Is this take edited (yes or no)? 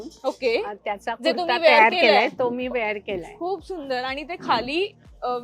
no